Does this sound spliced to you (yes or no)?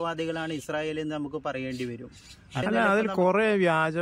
yes